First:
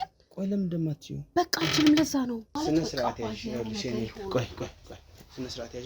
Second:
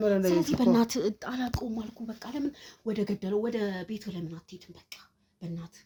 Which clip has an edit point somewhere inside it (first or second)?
first